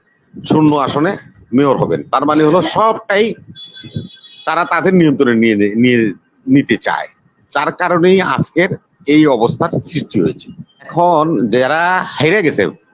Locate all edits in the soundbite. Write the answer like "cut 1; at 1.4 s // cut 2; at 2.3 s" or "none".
cut 1; at 10.9 s